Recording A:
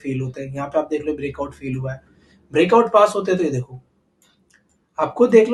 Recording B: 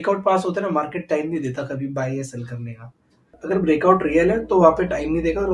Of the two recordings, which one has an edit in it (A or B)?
B